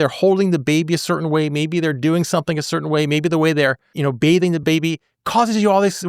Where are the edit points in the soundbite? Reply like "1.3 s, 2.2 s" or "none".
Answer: 3.9 s